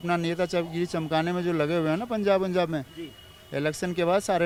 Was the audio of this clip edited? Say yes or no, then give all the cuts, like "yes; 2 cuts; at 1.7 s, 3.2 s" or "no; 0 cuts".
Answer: no; 0 cuts